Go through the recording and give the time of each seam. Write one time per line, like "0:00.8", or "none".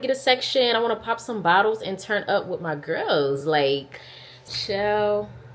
0:04.6